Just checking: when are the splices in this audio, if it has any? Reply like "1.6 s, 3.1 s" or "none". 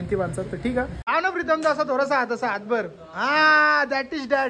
1.2 s